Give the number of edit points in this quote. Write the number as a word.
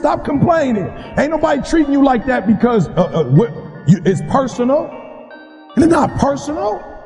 one